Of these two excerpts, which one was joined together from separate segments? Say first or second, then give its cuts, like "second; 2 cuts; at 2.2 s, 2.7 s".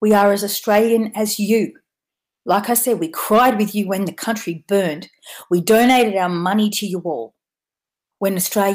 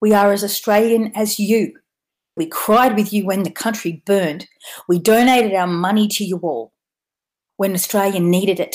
second; 1 cut; at 2.4 s